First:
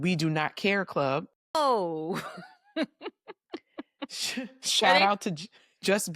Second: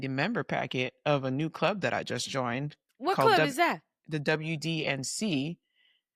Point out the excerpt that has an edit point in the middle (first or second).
first